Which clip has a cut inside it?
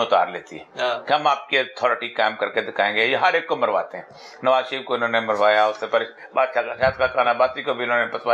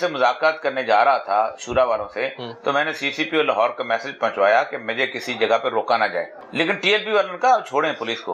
second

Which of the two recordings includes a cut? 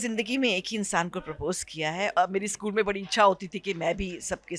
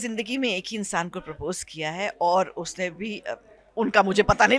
first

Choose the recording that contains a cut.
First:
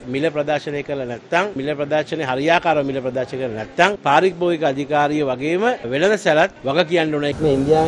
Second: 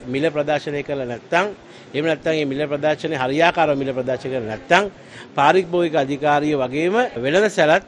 first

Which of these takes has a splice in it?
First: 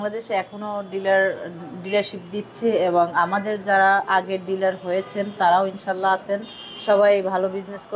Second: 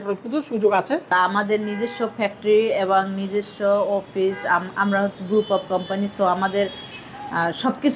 second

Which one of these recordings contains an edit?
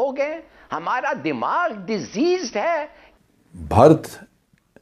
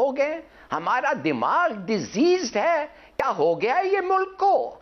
first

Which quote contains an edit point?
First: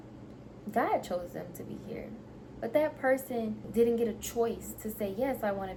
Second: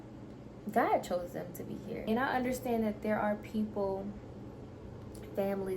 second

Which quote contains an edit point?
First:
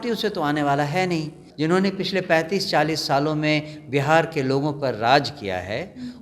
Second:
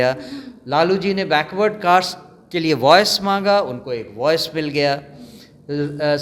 first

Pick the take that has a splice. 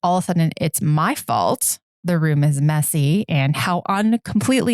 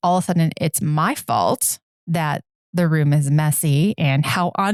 first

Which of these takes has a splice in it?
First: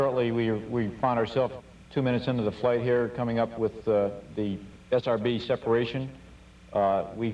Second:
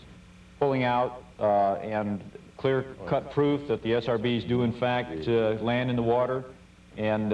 first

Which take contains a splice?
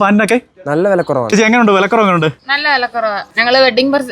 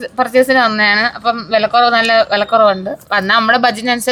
first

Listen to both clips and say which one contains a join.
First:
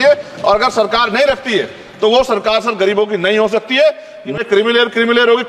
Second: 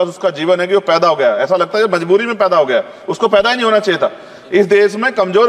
first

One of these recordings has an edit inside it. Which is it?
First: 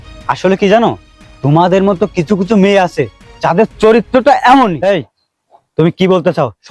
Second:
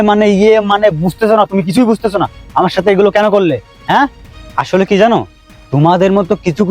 first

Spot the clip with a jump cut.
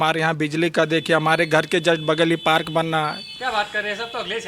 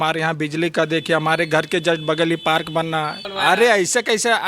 second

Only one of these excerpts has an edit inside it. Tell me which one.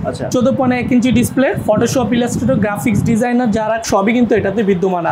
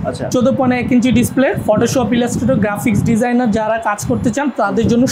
first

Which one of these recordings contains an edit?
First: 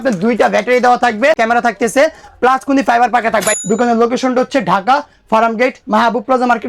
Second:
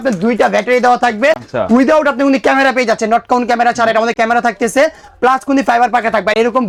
first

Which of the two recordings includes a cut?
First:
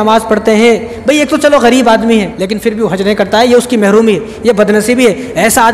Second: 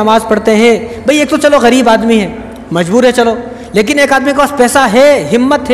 first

